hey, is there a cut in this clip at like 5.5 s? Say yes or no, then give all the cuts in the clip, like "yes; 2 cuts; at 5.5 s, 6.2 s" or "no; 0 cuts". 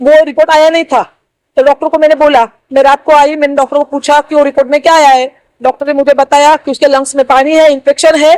no; 0 cuts